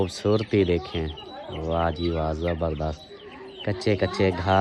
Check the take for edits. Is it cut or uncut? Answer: uncut